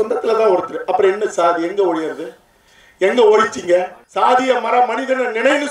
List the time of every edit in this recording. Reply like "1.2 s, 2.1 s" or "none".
4.0 s

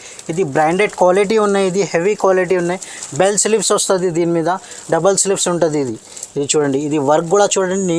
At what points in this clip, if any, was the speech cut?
none

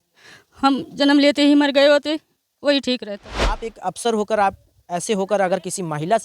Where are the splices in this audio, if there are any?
3.7 s

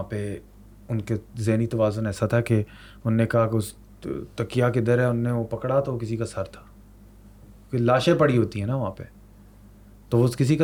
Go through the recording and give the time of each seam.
none

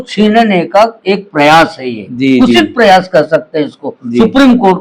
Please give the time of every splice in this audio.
none

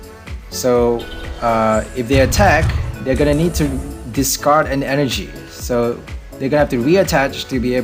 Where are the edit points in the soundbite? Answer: none

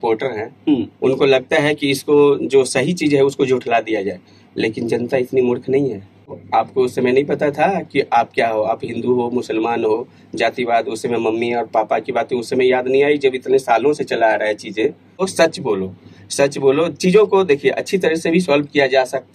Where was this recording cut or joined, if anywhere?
6.4 s, 15.2 s

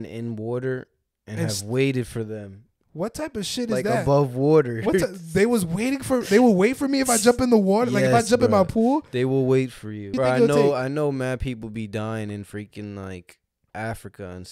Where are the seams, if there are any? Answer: 10.1 s

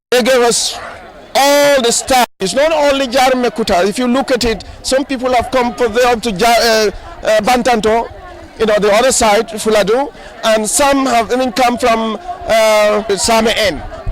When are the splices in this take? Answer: 2.4 s, 13.1 s

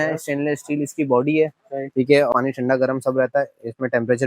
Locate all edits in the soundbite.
2.3 s

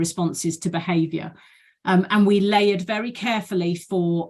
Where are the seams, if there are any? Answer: none

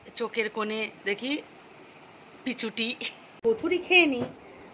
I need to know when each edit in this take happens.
3.4 s

